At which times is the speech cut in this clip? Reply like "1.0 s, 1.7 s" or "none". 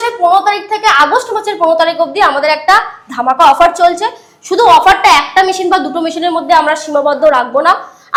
none